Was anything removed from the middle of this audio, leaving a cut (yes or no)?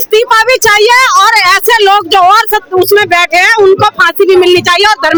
no